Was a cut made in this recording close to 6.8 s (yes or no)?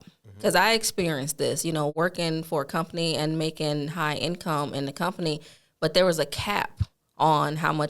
no